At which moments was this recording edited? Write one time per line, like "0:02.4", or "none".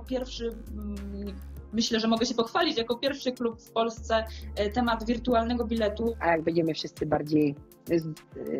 0:06.2